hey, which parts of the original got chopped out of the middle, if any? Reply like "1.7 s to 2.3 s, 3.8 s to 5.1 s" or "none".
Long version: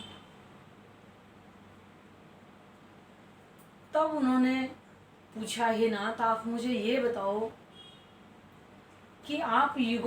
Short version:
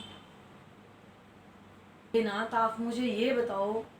2.1 s to 5.8 s